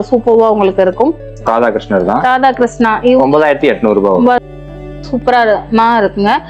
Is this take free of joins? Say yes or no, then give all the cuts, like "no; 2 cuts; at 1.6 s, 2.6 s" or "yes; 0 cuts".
no; 2 cuts; at 1.3 s, 4.4 s